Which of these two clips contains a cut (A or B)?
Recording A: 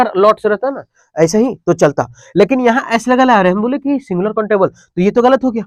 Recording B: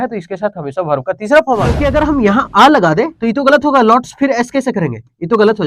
B